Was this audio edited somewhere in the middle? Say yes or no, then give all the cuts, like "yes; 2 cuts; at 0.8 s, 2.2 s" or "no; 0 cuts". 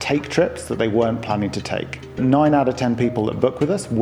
yes; 1 cut; at 2.2 s